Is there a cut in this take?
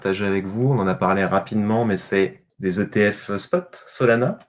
yes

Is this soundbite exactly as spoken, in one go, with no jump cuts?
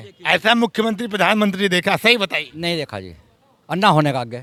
yes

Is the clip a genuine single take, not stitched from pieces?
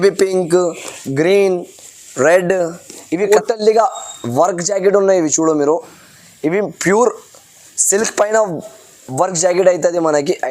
no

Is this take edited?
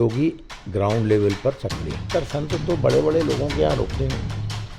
yes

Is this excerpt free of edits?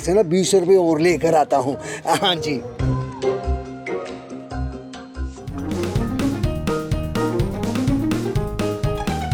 yes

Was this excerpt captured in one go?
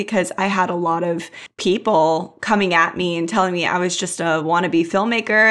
yes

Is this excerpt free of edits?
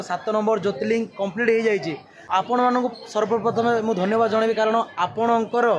no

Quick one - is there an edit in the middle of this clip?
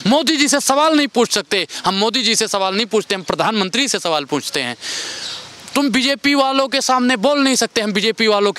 no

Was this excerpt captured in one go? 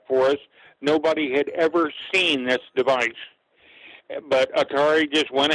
yes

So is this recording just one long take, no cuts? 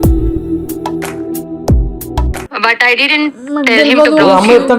no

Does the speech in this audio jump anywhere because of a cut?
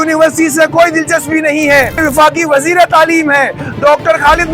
yes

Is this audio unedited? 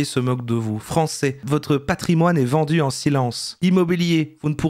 yes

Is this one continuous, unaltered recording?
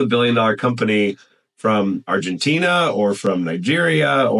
yes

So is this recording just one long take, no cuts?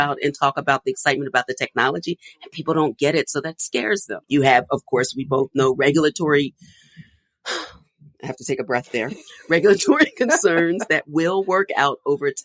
yes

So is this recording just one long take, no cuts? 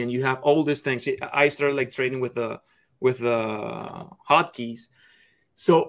yes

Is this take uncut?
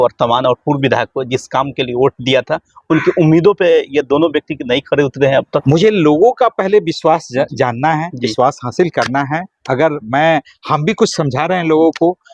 no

